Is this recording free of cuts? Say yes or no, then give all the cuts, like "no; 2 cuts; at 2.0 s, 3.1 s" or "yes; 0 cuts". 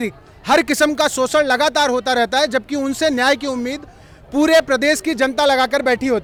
yes; 0 cuts